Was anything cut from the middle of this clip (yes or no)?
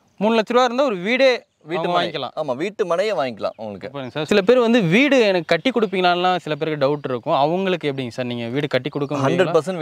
yes